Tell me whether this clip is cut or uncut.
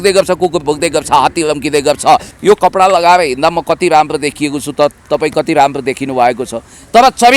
cut